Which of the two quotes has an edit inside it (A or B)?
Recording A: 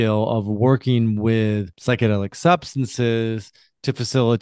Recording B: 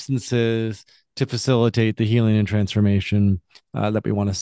A